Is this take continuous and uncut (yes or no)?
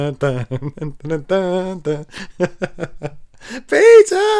yes